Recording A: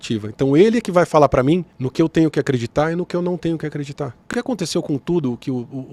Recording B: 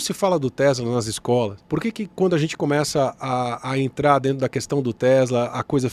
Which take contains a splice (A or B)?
A